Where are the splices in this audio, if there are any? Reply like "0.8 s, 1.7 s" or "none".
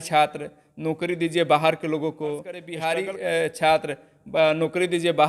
2.7 s

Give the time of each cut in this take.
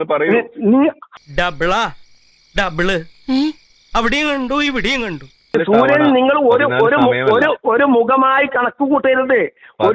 1.1 s, 5.5 s

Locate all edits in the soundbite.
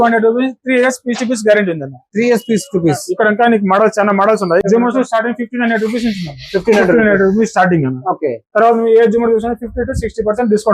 4.6 s

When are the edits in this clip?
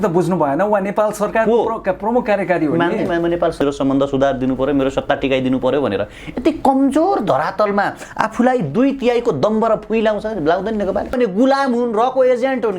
3.6 s, 11.2 s

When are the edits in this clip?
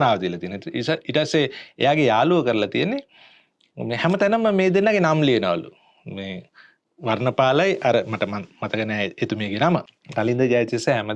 10.0 s

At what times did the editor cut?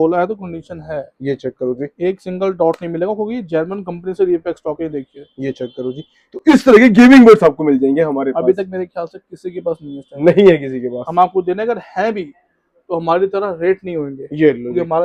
none

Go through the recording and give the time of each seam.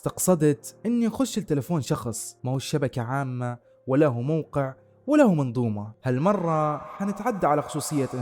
none

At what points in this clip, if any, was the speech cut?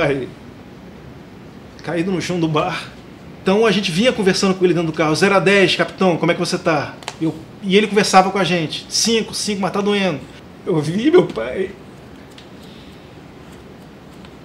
3.4 s, 10.3 s

